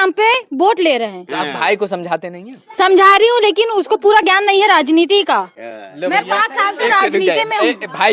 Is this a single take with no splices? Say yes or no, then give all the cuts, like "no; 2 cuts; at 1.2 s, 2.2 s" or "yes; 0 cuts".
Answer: yes; 0 cuts